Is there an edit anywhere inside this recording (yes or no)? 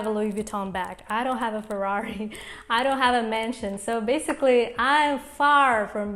no